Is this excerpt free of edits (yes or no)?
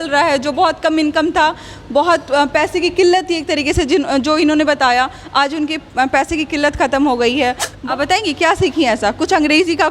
no